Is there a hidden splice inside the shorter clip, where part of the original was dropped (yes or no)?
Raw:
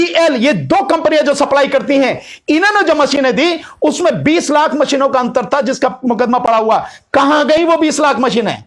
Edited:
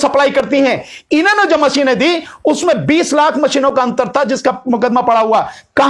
no